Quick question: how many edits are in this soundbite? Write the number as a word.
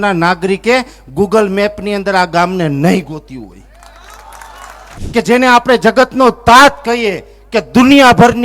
one